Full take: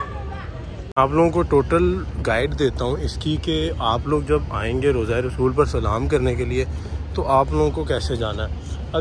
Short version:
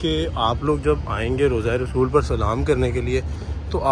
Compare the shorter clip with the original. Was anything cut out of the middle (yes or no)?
no